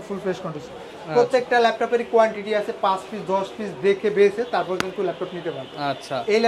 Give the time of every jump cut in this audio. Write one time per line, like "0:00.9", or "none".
none